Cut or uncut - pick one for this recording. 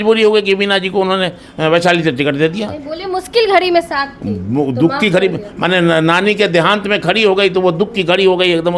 uncut